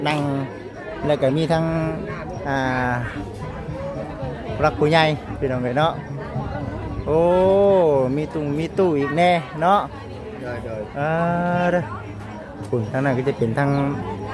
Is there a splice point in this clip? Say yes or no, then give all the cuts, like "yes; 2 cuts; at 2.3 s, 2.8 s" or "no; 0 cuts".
no; 0 cuts